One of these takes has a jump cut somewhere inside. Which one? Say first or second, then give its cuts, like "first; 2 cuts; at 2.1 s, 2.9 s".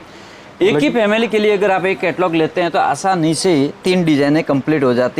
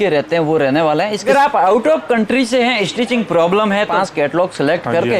second; 2 cuts; at 1.3 s, 3.9 s